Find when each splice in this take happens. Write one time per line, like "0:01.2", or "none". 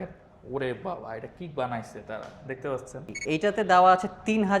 0:03.1